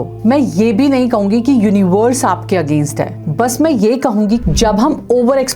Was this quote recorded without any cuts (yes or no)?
no